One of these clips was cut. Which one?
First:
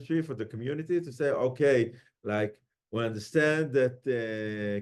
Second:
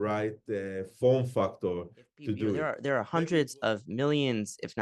second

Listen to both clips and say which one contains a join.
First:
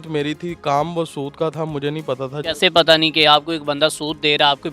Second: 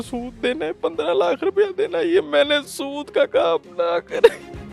first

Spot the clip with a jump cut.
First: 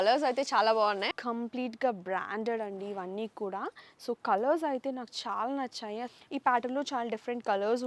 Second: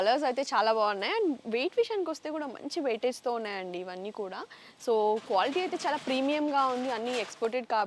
first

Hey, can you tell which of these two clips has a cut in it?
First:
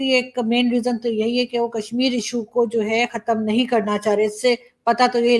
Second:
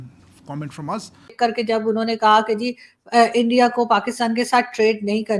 second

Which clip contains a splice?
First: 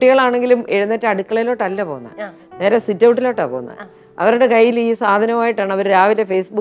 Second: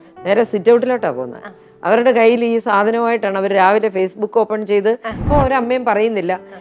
second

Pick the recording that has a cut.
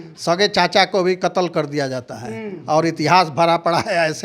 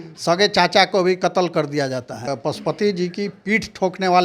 second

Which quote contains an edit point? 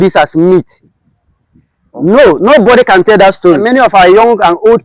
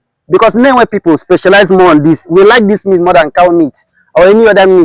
first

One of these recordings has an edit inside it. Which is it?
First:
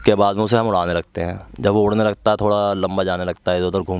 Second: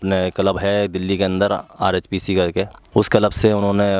second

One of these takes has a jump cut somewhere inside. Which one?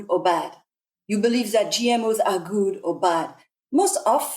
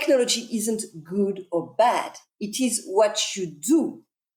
first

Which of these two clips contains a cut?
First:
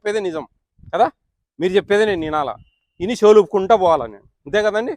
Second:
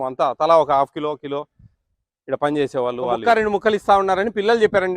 second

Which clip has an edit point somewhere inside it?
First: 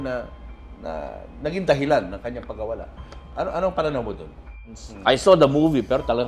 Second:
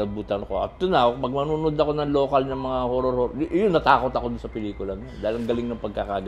first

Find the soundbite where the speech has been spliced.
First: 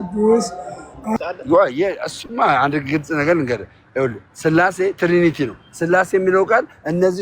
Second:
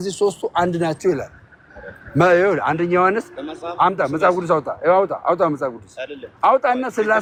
first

